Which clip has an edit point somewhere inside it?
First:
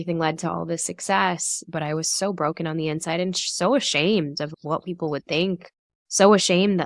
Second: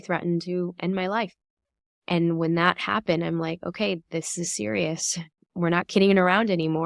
second; 1 cut; at 5.5 s

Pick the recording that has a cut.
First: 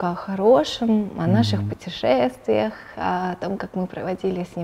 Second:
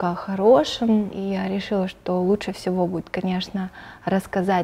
second; 1 cut; at 1.1 s

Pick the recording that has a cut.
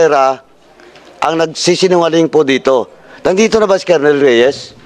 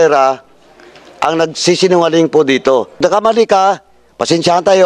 second; 1 cut; at 2.9 s

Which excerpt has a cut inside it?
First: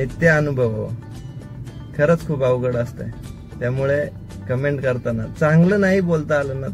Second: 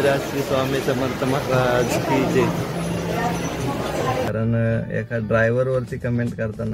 second; 1 cut; at 4.3 s

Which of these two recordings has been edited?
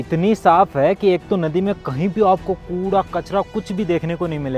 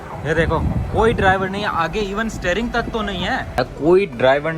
second; 1 cut; at 3.6 s

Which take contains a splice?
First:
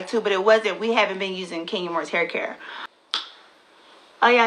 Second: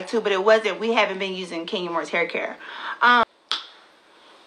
first; 1 cut; at 2.9 s

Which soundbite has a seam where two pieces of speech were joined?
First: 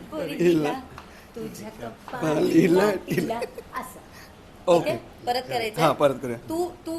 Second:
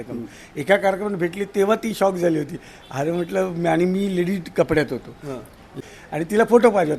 second; 1 cut; at 5.7 s

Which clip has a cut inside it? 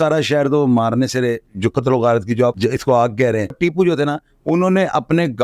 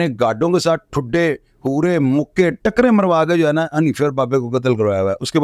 first; 3 cuts; at 1.5 s, 2.6 s, 3.6 s

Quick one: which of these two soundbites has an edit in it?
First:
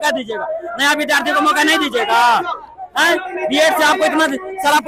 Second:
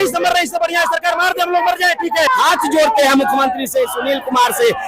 second; 1 cut; at 2.3 s

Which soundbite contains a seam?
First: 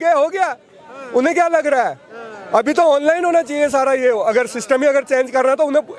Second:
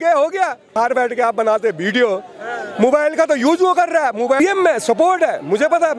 second; 2 cuts; at 0.8 s, 4.4 s

